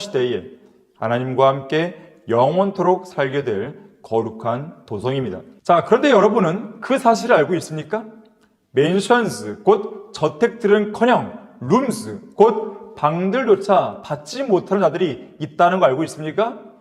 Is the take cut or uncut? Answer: cut